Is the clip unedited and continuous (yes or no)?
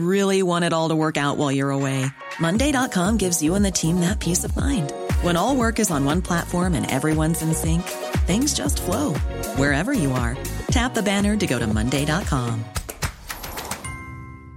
yes